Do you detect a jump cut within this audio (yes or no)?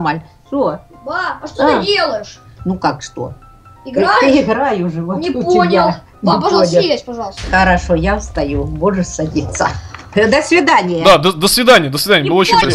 no